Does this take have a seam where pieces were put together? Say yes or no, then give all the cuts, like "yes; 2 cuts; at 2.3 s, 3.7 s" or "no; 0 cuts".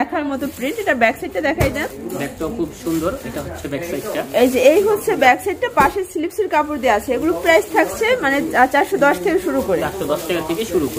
no; 0 cuts